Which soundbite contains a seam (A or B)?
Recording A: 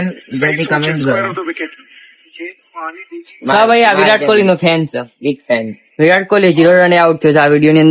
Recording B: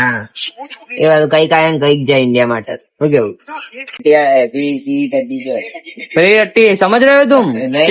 B